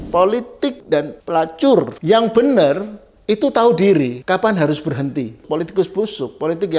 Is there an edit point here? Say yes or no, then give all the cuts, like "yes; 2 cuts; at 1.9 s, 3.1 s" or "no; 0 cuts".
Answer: yes; 4 cuts; at 0.9 s, 1.9 s, 4.2 s, 5.4 s